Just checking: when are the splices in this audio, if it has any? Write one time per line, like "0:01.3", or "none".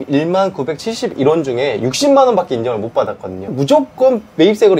0:03.5